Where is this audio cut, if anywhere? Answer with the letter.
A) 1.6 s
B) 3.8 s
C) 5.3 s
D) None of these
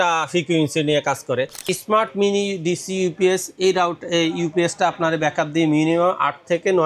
A